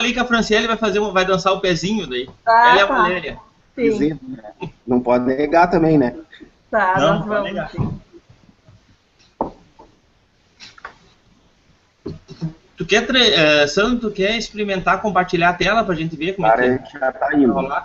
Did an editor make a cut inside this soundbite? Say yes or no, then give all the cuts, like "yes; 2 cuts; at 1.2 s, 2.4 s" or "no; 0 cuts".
no; 0 cuts